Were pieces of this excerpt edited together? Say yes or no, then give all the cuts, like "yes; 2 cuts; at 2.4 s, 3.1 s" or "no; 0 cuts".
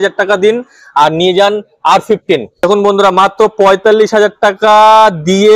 yes; 1 cut; at 2.6 s